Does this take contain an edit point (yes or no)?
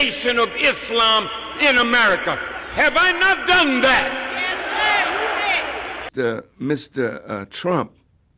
yes